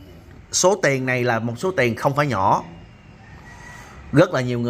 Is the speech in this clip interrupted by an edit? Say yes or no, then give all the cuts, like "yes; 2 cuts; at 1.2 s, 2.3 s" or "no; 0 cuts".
no; 0 cuts